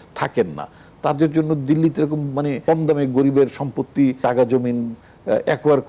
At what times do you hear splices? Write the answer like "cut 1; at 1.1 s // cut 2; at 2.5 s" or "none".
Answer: cut 1; at 2.6 s // cut 2; at 4.2 s